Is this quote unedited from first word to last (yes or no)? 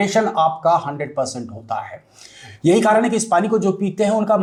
yes